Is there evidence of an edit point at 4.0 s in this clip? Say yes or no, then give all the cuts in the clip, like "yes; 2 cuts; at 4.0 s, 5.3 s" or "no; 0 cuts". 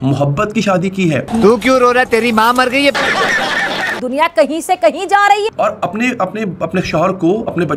yes; 1 cut; at 4.0 s